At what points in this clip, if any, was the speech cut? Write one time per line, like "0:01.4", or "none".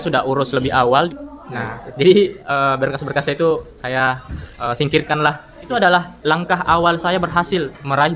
0:01.1
0:05.7